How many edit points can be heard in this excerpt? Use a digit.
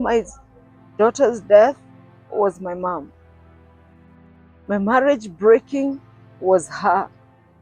2